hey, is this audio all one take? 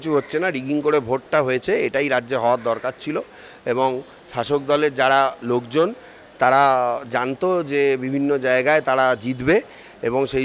yes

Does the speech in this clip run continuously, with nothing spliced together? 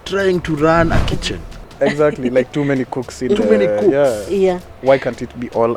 yes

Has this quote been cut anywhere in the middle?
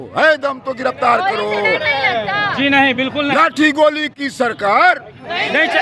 no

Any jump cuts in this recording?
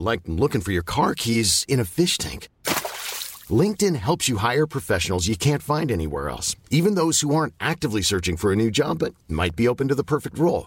no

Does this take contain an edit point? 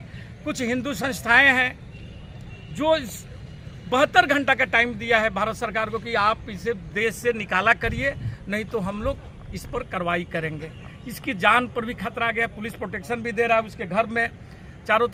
no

